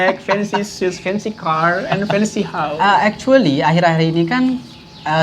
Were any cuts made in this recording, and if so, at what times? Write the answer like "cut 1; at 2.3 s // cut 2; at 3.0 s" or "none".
cut 1; at 2.6 s